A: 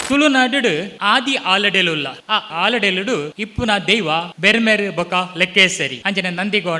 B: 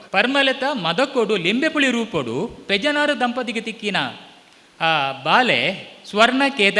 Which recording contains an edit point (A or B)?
A